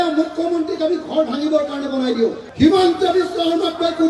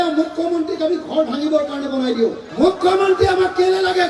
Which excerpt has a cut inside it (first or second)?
first